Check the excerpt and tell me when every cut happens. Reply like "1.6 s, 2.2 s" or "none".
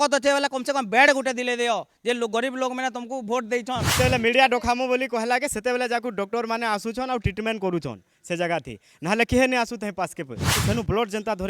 3.9 s, 10.6 s